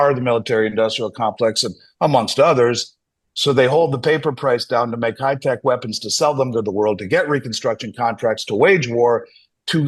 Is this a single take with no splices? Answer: yes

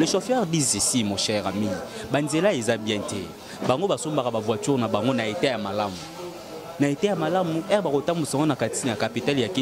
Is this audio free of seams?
yes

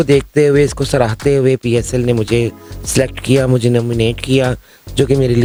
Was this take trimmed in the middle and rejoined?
no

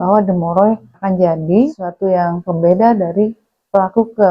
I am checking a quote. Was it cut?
yes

